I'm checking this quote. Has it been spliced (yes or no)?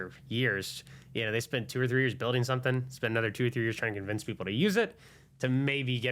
no